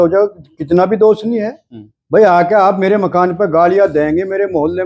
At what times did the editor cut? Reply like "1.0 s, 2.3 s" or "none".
none